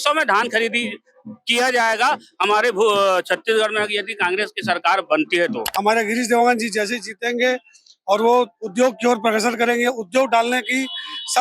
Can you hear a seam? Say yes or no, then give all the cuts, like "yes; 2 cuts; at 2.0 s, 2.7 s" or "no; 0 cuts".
yes; 1 cut; at 5.7 s